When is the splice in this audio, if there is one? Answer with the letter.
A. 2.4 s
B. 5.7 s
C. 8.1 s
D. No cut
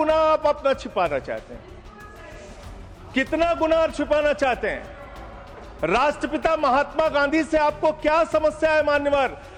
D